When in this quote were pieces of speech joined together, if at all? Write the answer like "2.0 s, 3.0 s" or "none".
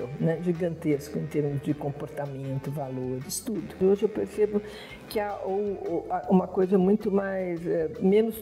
3.7 s